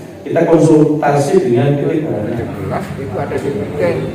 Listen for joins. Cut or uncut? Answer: cut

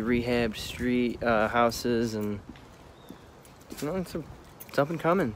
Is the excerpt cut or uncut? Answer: uncut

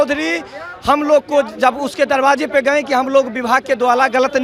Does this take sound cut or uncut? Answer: uncut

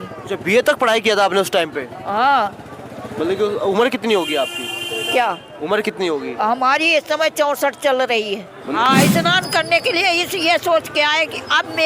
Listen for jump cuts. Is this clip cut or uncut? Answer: cut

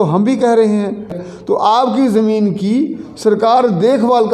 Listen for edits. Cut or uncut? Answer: cut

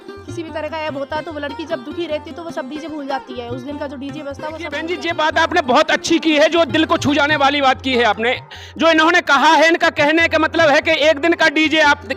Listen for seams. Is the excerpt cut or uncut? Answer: cut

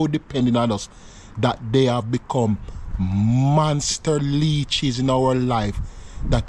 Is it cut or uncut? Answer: uncut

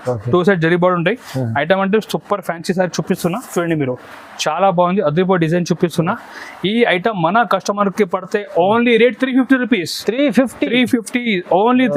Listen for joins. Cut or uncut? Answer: uncut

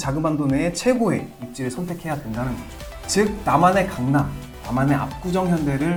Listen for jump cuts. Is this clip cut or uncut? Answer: uncut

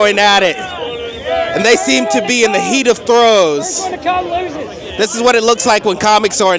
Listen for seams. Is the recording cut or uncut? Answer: uncut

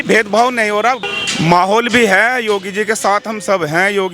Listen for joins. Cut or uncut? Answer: cut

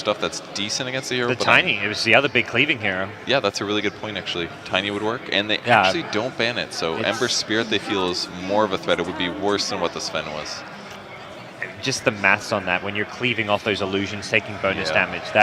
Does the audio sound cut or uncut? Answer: cut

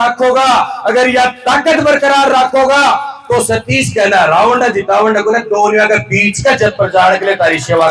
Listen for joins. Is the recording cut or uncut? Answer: uncut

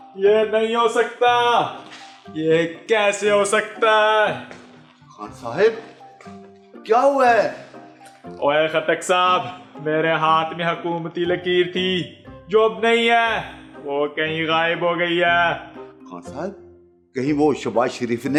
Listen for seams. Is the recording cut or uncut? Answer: uncut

